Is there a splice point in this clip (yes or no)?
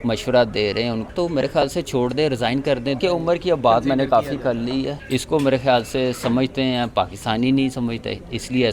yes